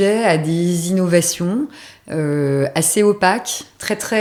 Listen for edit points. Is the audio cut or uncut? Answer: uncut